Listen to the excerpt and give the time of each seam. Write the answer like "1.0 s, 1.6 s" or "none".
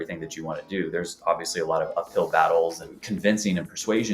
2.8 s